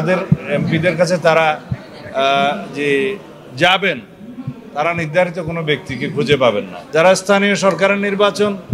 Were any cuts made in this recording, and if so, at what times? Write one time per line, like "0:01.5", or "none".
0:06.7

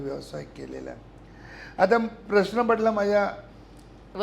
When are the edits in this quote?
none

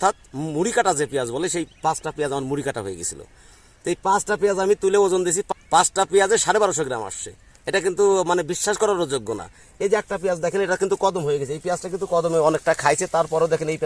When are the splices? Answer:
none

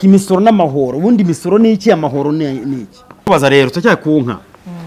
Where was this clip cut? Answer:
0:03.2

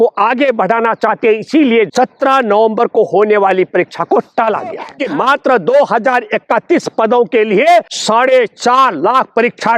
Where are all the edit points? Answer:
0:01.9
0:04.9
0:08.0

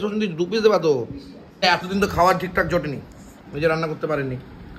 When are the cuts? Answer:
0:01.6

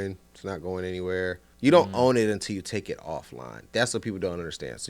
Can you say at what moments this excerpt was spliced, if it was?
0:01.5

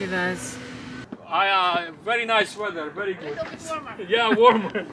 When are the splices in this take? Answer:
0:01.0

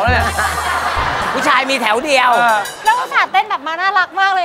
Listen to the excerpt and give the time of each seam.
0:02.7

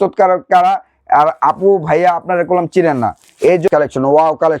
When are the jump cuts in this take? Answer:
0:03.7

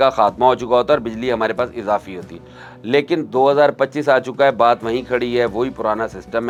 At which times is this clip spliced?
none

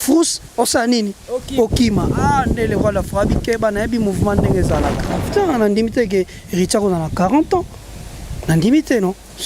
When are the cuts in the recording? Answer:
0:05.1

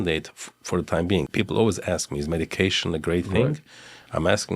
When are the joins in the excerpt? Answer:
0:01.3

